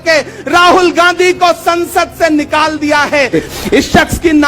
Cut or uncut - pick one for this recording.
cut